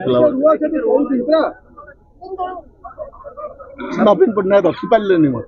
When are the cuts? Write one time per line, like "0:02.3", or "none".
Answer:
0:00.9
0:03.7